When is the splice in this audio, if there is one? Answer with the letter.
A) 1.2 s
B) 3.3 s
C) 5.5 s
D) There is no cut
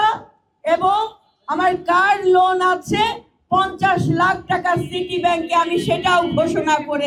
D